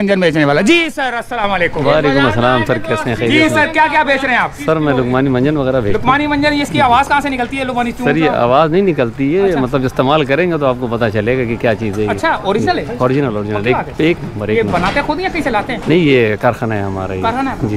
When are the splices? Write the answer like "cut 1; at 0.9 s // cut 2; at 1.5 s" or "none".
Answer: none